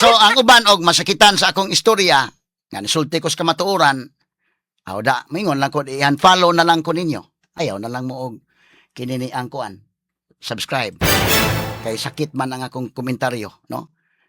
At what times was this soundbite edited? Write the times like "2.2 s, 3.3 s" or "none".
7.6 s